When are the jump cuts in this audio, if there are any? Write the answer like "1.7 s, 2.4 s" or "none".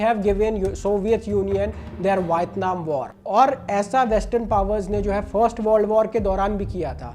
3.1 s